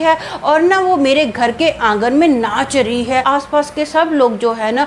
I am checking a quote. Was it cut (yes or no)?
yes